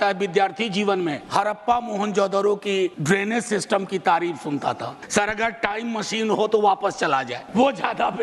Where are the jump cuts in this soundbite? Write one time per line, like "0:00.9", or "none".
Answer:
0:01.2
0:03.0
0:04.9
0:07.4

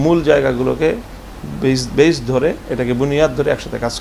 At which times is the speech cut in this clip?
none

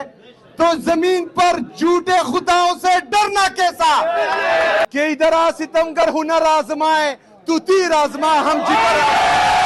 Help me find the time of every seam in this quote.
0:04.8

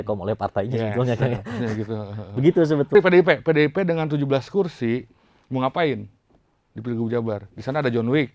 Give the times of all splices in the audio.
0:02.9

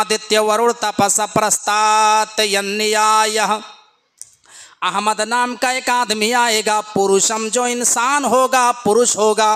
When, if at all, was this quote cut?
none

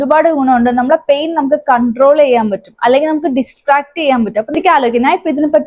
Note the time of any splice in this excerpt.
0:04.5

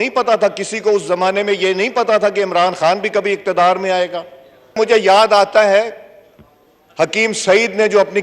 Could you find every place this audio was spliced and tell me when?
0:04.6

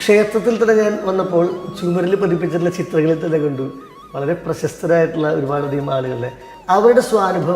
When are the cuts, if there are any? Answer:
0:06.5

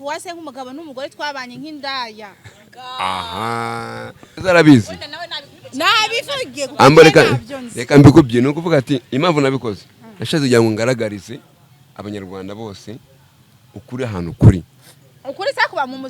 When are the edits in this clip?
0:04.2

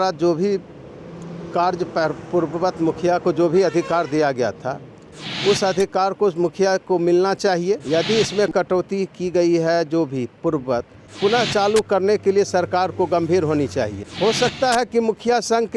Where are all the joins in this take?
0:07.8
0:11.0
0:14.0

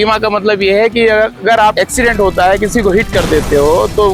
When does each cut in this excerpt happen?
none

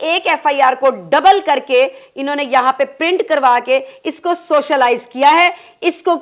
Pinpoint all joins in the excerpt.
none

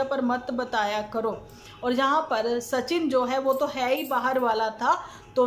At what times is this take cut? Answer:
none

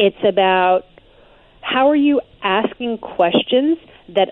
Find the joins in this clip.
none

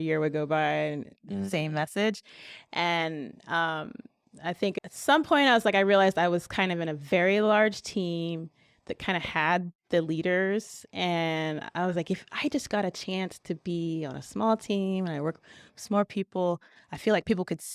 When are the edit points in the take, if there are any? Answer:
none

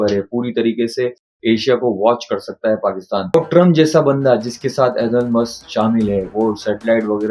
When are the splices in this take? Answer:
0:03.3

